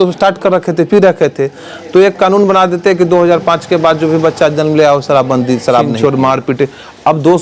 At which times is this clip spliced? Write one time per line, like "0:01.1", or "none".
0:05.9